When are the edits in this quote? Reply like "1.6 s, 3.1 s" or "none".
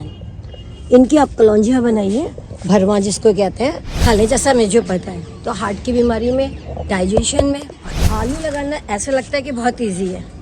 3.9 s, 7.9 s